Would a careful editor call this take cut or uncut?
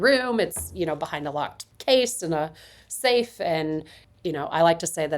cut